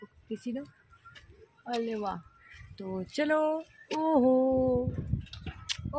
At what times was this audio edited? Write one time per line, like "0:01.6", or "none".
none